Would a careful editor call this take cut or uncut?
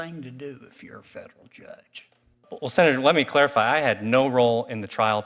cut